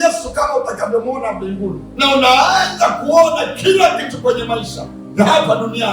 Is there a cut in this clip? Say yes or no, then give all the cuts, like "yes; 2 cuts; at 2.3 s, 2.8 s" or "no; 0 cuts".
yes; 1 cut; at 1.8 s